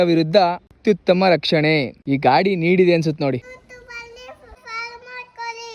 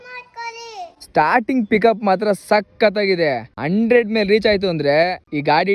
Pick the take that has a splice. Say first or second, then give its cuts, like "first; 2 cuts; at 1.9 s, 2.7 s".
first; 1 cut; at 3.5 s